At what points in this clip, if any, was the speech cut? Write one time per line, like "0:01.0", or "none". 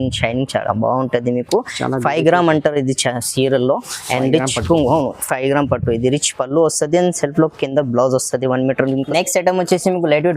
0:09.1